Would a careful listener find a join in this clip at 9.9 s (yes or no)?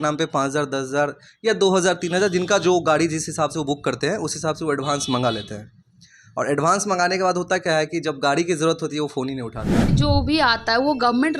yes